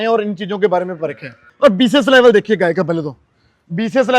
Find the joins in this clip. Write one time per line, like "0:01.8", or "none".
0:01.4